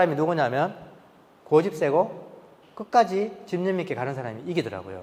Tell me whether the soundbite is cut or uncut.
uncut